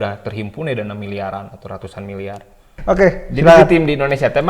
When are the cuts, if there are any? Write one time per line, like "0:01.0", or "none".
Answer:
0:02.7